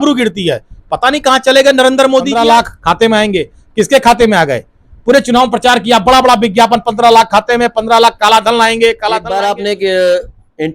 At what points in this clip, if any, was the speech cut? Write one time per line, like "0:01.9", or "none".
0:02.3
0:09.3